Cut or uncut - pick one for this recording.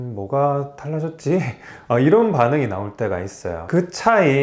uncut